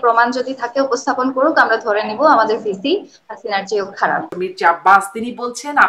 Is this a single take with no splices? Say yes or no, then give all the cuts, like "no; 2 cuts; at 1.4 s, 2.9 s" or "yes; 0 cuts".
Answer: no; 1 cut; at 4.3 s